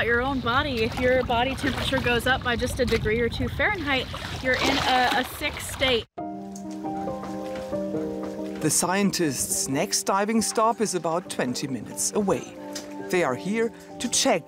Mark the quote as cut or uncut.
uncut